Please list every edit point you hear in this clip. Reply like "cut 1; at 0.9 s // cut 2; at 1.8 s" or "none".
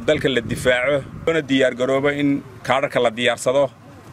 cut 1; at 1.3 s